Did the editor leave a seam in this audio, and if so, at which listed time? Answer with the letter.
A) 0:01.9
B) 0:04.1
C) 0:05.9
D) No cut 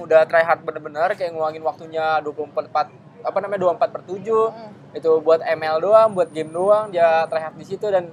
D